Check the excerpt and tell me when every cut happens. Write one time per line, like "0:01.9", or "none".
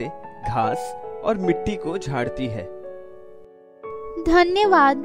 0:02.3
0:04.0